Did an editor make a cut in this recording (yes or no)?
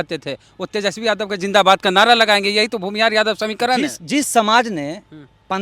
no